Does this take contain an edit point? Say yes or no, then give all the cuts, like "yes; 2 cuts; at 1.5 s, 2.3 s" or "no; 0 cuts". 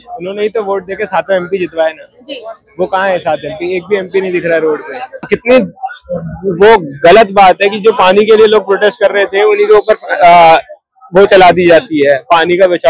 yes; 1 cut; at 5.3 s